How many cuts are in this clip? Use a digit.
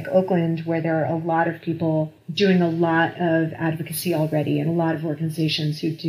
0